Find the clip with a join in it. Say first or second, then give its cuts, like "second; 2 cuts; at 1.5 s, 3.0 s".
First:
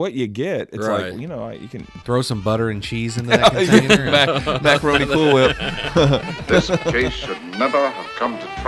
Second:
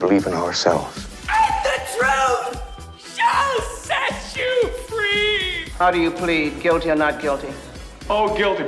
first; 2 cuts; at 2.0 s, 6.9 s